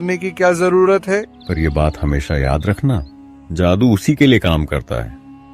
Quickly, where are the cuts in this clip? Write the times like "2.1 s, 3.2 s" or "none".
1.4 s